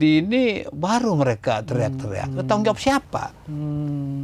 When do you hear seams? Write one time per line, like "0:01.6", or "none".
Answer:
none